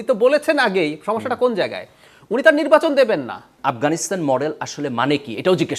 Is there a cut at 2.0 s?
no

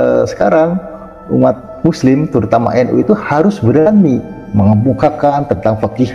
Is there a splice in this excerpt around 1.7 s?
yes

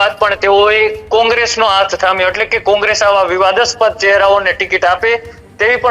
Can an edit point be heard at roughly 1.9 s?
no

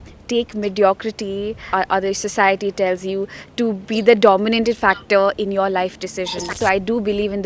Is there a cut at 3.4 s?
no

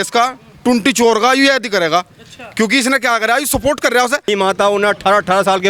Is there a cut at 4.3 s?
yes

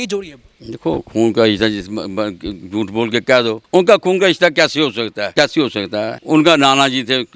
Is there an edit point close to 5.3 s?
yes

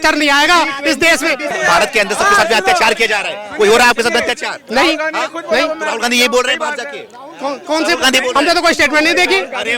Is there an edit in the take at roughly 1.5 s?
yes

